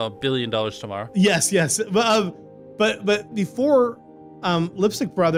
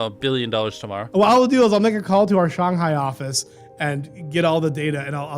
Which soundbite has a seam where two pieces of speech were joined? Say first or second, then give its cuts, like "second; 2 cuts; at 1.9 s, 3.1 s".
second; 1 cut; at 1.0 s